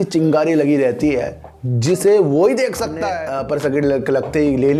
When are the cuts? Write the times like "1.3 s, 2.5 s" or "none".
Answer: 3.0 s